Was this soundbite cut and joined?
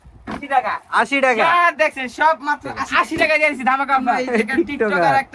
yes; 2 cuts; at 2.8 s, 4.2 s

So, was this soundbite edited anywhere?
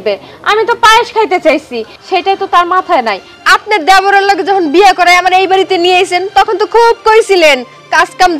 yes; 1 cut; at 3.2 s

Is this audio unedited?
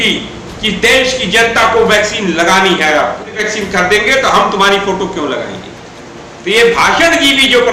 no; 1 cut; at 3.4 s

